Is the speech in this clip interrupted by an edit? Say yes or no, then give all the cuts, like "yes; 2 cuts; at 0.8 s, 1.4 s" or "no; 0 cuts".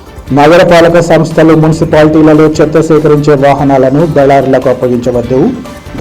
no; 0 cuts